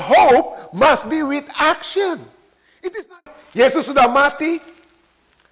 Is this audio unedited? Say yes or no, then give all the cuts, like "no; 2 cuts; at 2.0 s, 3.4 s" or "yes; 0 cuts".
no; 1 cut; at 3.1 s